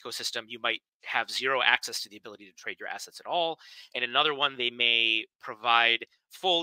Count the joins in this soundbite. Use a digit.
0